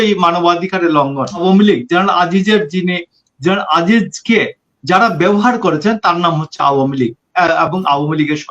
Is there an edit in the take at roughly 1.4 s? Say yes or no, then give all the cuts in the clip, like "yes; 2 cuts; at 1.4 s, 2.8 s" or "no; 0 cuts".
yes; 1 cut; at 1.4 s